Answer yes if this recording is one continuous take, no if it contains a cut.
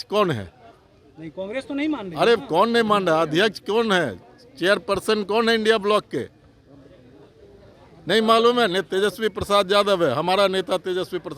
yes